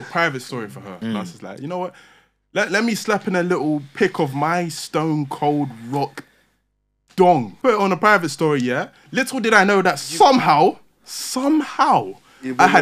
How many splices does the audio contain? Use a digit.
2